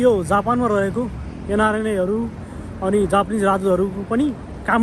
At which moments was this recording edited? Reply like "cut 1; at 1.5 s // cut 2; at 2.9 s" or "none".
none

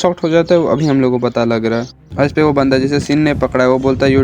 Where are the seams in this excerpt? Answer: cut 1; at 2.0 s

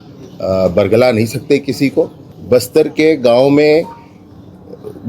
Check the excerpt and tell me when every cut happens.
cut 1; at 2.3 s

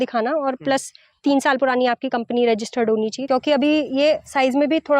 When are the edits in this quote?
cut 1; at 3.2 s

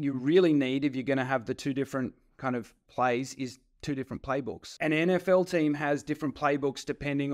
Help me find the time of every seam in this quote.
cut 1; at 4.7 s

